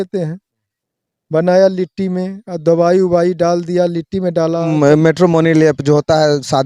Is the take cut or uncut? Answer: cut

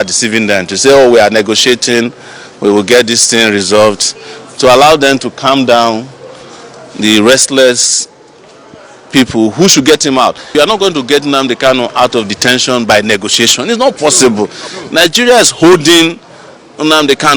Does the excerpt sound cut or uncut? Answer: cut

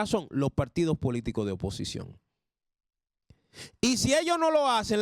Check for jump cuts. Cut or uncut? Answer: uncut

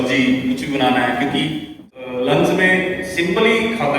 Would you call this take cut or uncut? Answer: cut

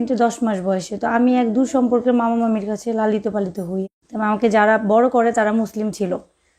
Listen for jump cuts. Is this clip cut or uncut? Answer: cut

